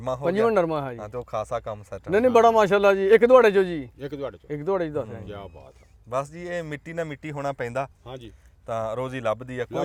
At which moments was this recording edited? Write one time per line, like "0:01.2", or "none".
none